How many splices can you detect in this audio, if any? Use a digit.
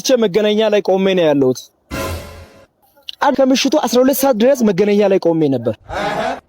1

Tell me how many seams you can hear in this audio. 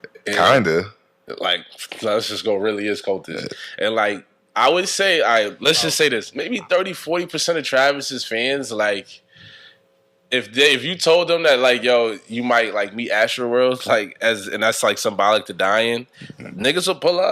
1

